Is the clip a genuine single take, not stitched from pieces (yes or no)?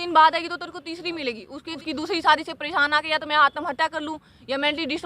no